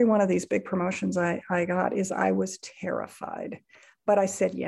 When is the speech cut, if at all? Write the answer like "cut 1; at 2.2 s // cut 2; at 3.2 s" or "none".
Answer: none